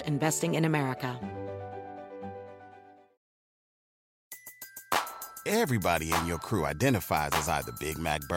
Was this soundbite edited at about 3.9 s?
no; 1 cut; at 1.2 s

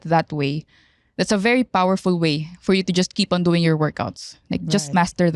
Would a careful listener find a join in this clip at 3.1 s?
no; 0 cuts

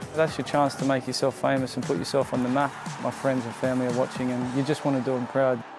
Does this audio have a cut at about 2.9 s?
yes; 1 cut; at 2.9 s

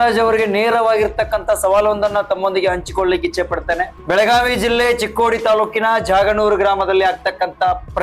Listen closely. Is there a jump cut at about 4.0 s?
yes; 1 cut; at 4.0 s

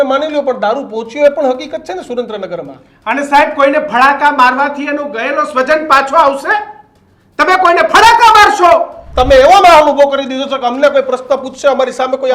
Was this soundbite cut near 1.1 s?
no; 1 cut; at 9.0 s

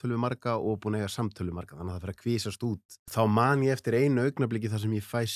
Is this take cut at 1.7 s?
no; 1 cut; at 2.9 s

